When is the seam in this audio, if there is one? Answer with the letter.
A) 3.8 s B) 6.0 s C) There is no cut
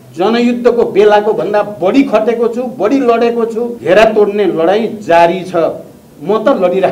A